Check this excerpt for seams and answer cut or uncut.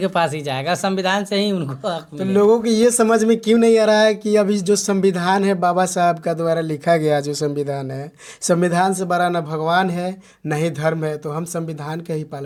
uncut